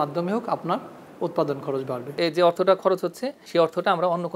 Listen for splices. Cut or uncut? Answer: cut